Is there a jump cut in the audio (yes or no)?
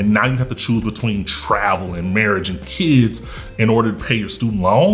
no